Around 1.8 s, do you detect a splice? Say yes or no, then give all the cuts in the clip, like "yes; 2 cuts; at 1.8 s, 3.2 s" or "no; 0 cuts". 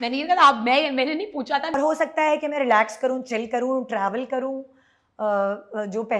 yes; 1 cut; at 1.8 s